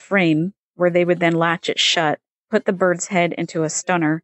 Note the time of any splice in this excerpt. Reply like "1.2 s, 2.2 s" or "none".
2.3 s

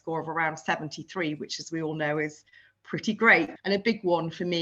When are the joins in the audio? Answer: 3.6 s

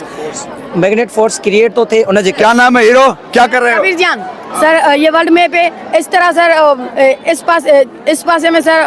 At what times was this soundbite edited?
2.4 s, 4.4 s

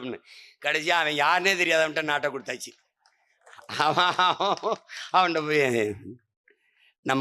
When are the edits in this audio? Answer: none

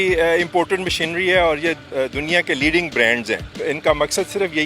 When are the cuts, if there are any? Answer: 1.8 s, 3.5 s

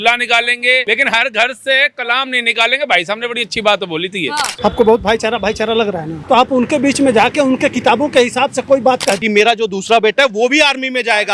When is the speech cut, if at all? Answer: 0.8 s, 4.5 s, 6.1 s, 9.2 s

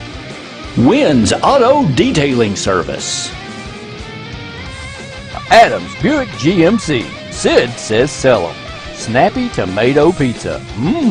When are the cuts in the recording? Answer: none

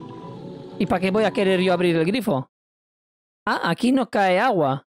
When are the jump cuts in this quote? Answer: none

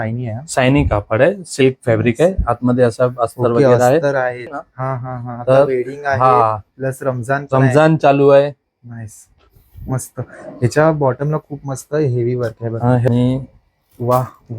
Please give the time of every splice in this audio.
4.5 s, 13.1 s

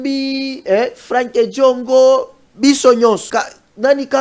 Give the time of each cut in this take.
3.2 s

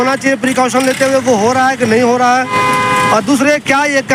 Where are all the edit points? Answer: none

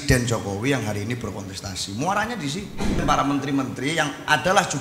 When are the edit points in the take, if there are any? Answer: 3.0 s

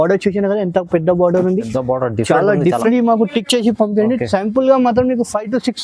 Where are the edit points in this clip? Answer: 2.9 s

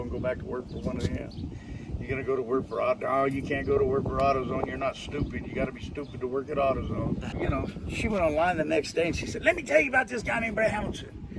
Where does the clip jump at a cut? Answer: 7.3 s

